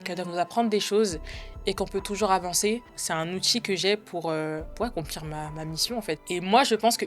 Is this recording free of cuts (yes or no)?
no